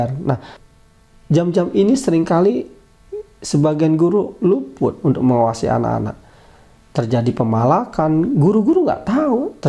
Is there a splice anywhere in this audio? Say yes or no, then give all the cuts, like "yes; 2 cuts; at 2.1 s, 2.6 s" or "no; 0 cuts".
no; 0 cuts